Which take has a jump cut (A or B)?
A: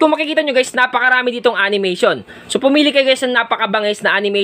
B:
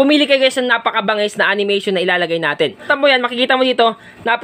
B